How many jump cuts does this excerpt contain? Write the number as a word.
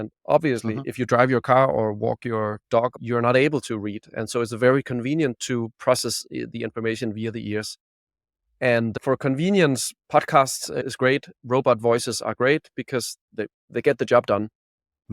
five